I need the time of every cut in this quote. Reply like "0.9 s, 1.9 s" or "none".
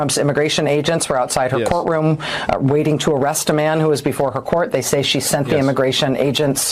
none